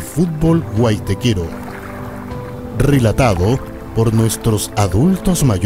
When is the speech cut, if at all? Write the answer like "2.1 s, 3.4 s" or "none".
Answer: 1.5 s, 2.8 s